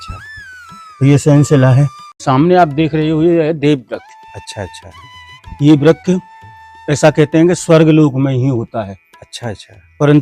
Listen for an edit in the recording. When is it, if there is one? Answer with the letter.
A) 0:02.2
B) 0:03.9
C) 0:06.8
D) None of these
A